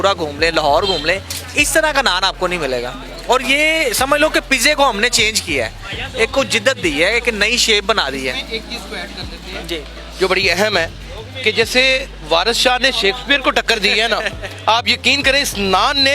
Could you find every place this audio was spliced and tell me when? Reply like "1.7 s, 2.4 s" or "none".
none